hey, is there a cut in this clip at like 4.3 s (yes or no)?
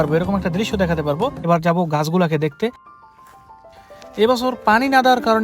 no